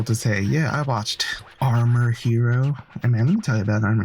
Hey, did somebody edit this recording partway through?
no; 0 cuts

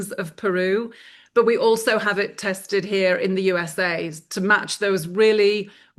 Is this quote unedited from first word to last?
yes; 0 cuts

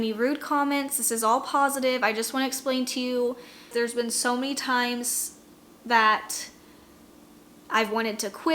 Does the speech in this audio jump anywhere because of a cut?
yes; 1 cut; at 3.5 s

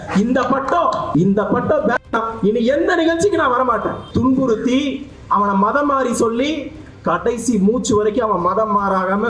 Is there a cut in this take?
yes; 3 cuts; at 1.0 s, 2.1 s, 4.1 s

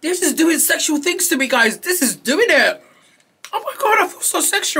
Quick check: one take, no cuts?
yes; 0 cuts

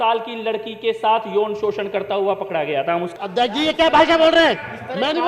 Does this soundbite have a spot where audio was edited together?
yes; 1 cut; at 3.1 s

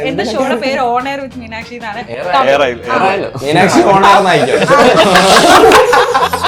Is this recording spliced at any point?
no; 0 cuts

